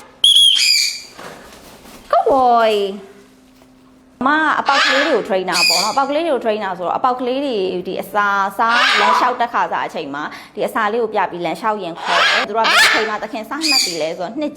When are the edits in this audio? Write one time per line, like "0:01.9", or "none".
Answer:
0:04.1
0:12.4